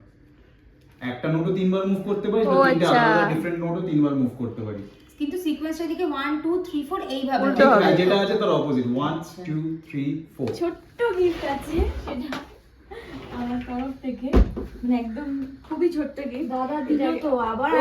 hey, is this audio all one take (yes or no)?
no